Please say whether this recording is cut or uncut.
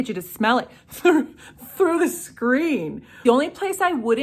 cut